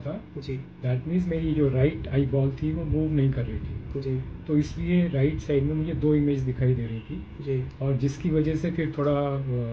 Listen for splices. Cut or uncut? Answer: uncut